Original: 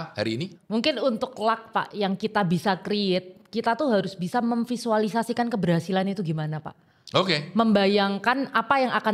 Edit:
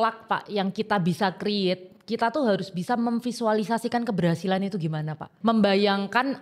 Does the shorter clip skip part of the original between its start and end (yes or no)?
yes